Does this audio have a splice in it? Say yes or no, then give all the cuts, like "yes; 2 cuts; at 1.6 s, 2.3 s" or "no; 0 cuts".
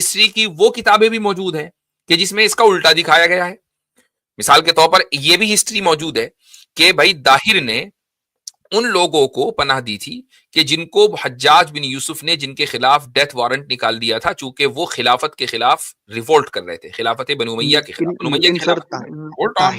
no; 0 cuts